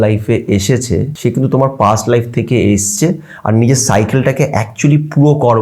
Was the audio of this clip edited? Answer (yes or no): yes